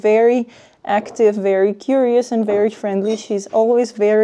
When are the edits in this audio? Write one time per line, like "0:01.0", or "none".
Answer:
none